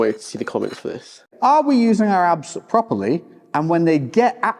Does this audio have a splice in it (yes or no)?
yes